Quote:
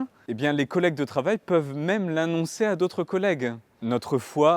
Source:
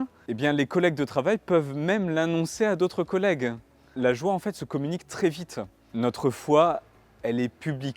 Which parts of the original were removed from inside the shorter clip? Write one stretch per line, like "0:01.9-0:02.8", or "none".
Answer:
0:03.7-0:05.8

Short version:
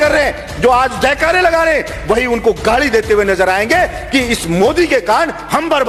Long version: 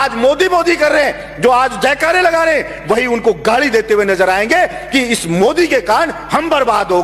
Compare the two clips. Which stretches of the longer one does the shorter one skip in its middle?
none

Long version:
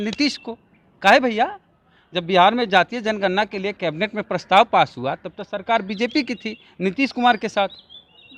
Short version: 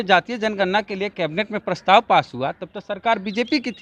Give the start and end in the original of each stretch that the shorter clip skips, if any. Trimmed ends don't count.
none

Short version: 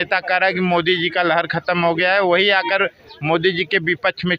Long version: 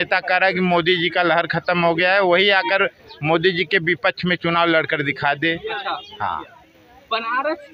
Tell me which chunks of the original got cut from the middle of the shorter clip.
none

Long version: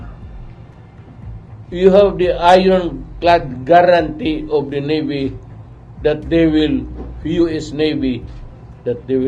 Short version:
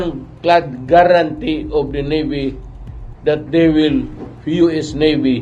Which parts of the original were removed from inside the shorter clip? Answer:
none

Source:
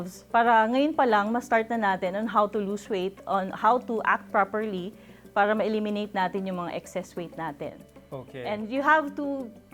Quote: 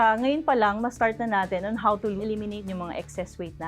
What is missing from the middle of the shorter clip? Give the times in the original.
0:03.1-0:06.4

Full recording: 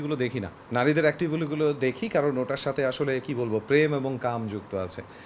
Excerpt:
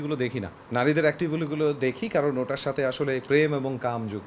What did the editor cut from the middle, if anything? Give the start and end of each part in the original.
0:03.2-0:03.6

